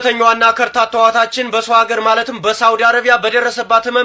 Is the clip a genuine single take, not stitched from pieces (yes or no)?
yes